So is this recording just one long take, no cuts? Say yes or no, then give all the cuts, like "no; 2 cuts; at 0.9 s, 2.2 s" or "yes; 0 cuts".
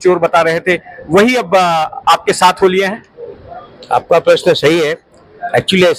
yes; 0 cuts